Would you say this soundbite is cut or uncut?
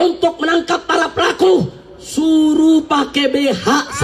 uncut